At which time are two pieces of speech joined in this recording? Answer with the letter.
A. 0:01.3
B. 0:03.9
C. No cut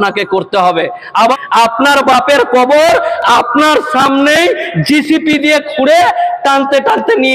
A